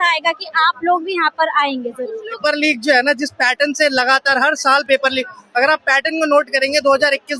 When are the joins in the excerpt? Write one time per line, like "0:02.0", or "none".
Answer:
0:02.4

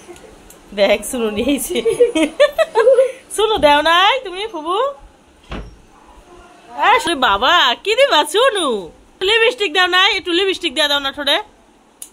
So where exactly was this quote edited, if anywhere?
0:07.0
0:09.2

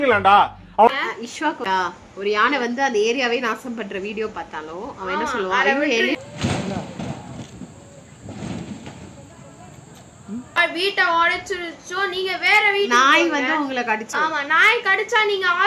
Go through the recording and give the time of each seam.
0:01.6
0:10.6
0:14.1

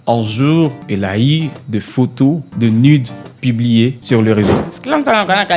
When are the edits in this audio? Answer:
0:04.6

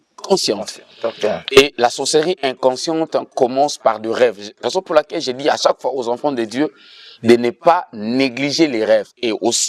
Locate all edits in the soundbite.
none

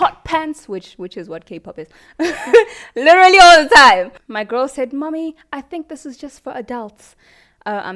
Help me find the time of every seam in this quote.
0:04.2

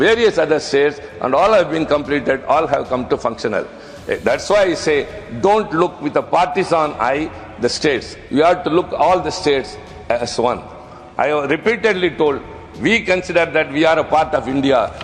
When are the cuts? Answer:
none

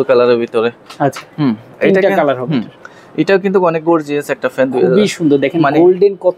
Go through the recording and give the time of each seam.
none

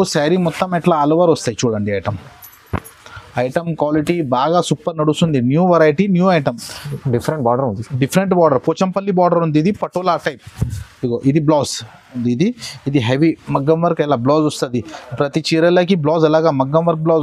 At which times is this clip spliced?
0:12.2

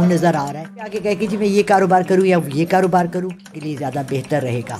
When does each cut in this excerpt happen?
0:01.0
0:03.6

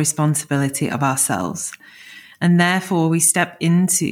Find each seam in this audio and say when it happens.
none

